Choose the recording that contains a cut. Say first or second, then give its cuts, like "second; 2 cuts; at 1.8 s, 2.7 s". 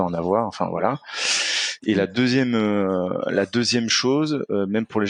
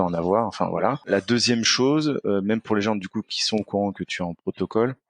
second; 1 cut; at 1.0 s